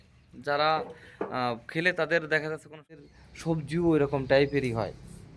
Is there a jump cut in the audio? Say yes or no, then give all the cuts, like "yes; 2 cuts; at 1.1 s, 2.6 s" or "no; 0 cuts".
yes; 1 cut; at 3.1 s